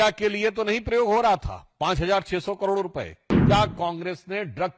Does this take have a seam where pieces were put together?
yes; 1 cut; at 3.3 s

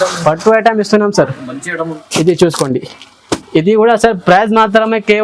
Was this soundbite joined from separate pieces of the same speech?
yes; 1 cut; at 2.0 s

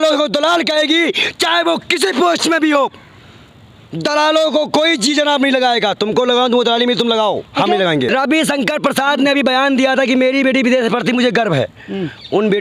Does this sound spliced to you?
yes; 1 cut; at 8.1 s

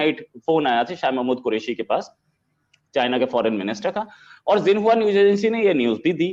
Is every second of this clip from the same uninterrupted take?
yes; 0 cuts

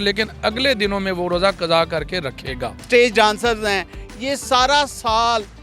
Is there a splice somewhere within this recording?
yes; 1 cut; at 2.7 s

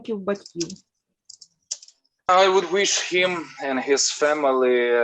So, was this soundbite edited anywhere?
yes; 1 cut; at 2.3 s

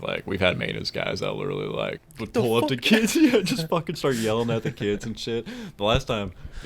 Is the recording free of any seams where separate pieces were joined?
no; 1 cut; at 2.1 s

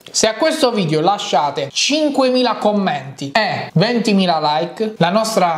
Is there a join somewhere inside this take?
no; 0 cuts

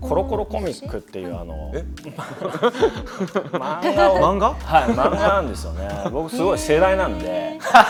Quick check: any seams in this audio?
no; 0 cuts

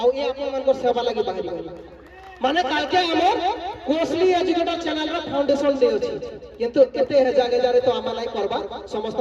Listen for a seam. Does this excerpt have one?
no; 0 cuts

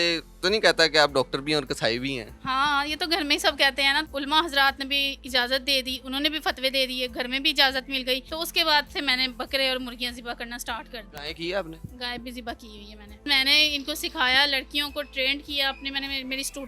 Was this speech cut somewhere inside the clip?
yes; 5 cuts; at 2.3 s, 4.1 s, 8.3 s, 11.1 s, 13.2 s

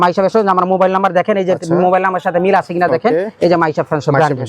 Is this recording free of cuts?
yes; 0 cuts

